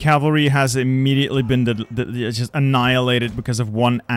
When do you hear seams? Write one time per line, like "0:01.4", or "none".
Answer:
none